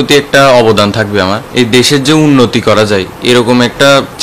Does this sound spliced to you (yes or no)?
yes